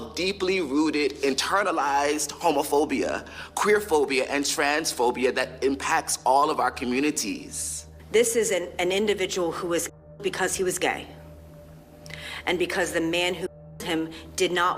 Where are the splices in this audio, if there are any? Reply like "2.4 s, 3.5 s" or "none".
none